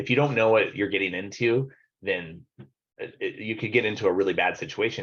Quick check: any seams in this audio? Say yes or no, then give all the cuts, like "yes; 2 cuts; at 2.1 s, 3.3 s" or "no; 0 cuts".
no; 0 cuts